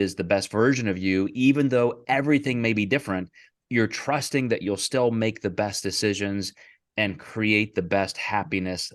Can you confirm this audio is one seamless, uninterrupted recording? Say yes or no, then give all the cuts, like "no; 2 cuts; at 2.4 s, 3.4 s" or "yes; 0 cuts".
yes; 0 cuts